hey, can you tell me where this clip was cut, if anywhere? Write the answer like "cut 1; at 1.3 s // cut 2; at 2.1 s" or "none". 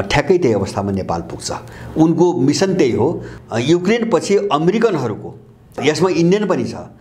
cut 1; at 3.3 s // cut 2; at 5.8 s